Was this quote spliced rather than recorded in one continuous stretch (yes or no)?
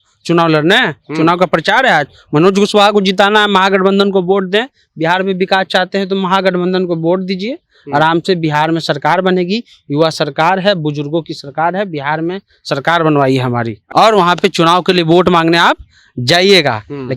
yes